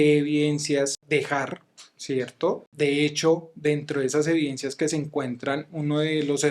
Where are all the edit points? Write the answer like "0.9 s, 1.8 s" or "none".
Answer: 1.0 s, 2.7 s